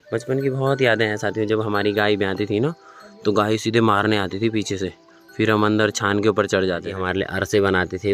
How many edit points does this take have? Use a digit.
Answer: 1